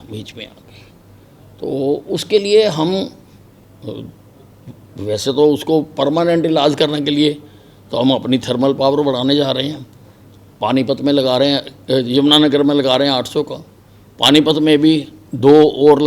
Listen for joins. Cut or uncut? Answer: uncut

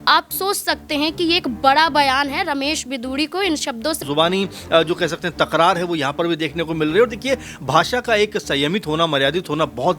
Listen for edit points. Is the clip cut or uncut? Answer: cut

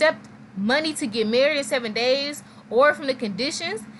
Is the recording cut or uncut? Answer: uncut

